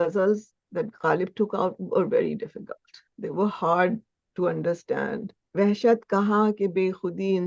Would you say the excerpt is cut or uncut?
cut